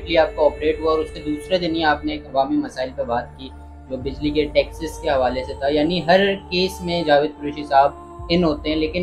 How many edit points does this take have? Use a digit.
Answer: 1